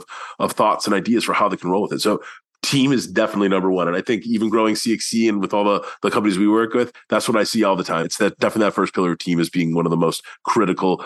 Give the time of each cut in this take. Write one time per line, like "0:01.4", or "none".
0:08.1